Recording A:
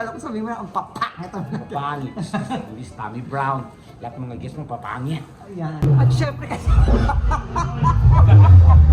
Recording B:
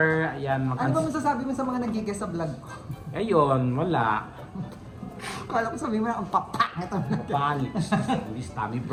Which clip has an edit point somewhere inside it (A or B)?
A